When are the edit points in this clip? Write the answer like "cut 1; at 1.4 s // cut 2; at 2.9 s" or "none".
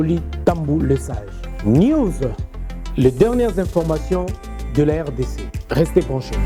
none